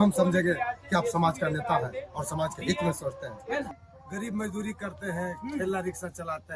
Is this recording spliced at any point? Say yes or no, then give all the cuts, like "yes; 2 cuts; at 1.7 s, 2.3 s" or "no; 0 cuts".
yes; 1 cut; at 3.7 s